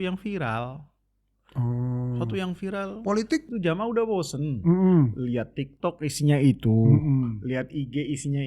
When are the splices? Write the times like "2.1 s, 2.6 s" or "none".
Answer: 3.5 s